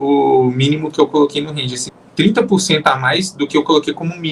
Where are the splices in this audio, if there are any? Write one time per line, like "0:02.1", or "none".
0:01.8

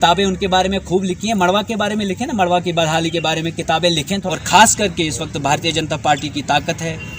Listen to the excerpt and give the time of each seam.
0:04.2

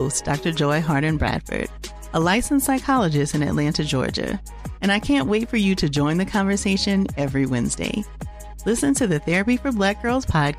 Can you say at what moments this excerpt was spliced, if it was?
none

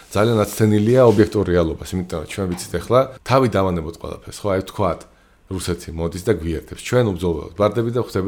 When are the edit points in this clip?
0:03.2

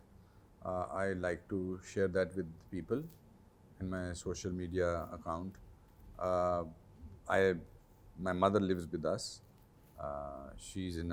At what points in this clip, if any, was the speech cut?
none

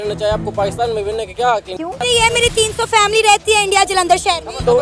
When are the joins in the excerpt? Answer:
0:02.0

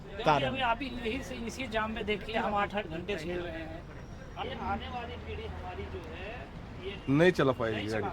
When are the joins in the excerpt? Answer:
0:04.4

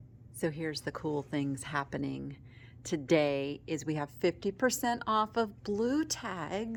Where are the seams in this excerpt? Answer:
none

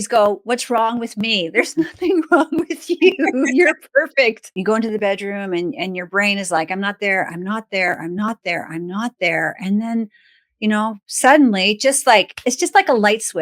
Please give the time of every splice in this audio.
0:04.5

